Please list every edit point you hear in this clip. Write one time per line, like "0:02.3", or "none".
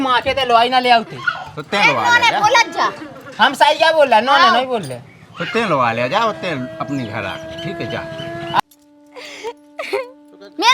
0:08.6